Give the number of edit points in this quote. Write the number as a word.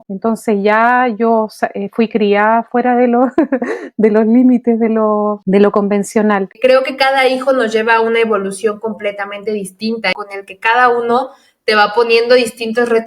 two